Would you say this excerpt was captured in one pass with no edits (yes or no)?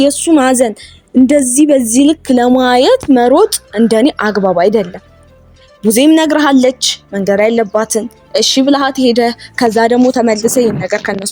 yes